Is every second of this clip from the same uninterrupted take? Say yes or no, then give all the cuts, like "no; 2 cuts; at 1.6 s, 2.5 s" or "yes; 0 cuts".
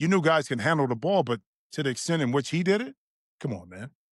yes; 0 cuts